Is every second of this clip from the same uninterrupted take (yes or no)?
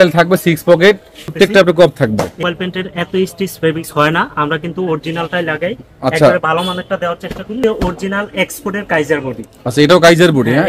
no